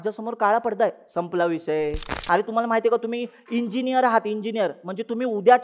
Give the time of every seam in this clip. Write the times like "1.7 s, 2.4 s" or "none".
2.2 s